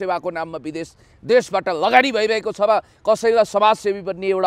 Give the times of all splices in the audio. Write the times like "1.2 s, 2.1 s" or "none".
none